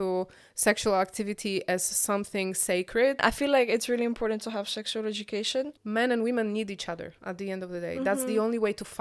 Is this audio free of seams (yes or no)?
no